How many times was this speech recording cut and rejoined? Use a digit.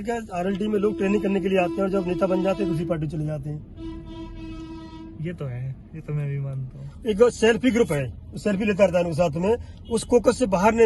1